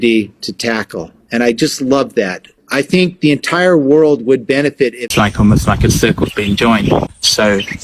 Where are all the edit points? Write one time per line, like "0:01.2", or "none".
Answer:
0:05.0